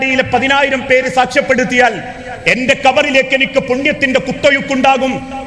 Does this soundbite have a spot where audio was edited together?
no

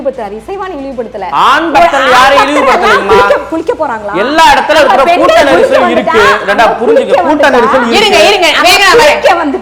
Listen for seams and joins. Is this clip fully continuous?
yes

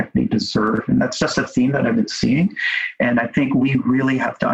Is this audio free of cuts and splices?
yes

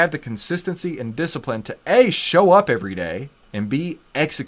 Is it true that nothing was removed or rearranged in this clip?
no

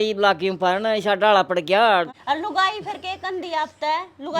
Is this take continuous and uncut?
no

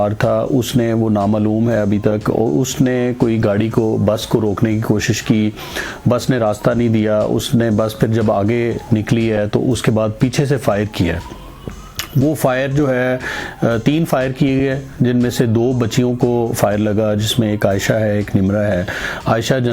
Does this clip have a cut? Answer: no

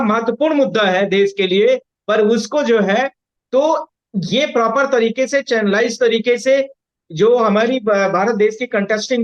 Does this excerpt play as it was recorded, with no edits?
yes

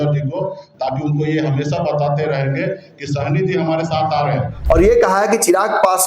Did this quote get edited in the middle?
yes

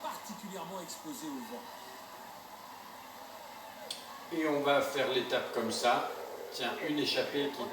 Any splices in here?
yes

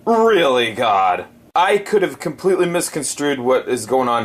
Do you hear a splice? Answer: yes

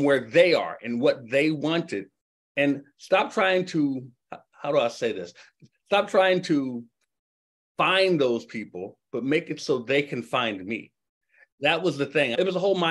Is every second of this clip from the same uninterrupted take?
no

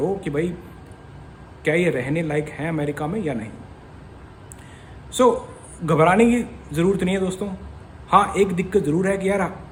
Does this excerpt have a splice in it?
no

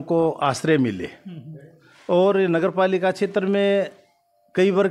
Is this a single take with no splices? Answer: yes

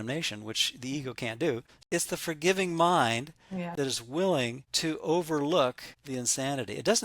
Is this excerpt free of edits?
no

